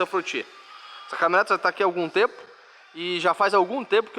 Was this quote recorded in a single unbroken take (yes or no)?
yes